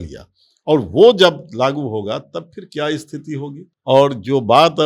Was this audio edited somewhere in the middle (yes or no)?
yes